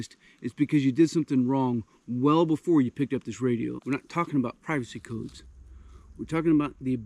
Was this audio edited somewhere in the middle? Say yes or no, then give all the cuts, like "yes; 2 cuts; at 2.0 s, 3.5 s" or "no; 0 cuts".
yes; 1 cut; at 3.8 s